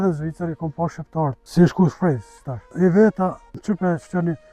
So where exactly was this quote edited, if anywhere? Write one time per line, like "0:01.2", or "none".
0:01.4
0:02.6
0:03.6